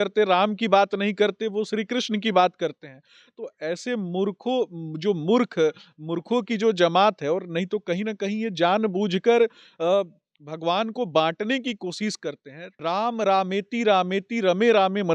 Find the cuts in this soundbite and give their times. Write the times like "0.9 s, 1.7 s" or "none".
12.6 s